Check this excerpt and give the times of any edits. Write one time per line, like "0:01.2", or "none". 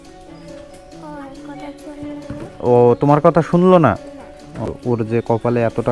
0:04.7